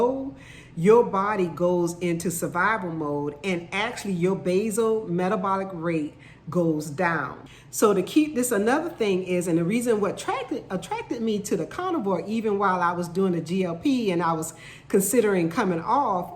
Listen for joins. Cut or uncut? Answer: cut